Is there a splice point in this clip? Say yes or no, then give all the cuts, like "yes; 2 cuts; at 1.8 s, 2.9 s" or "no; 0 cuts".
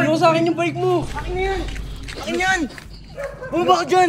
yes; 1 cut; at 1.1 s